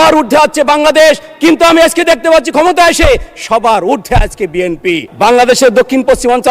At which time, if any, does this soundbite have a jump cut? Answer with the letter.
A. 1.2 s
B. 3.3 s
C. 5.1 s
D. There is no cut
C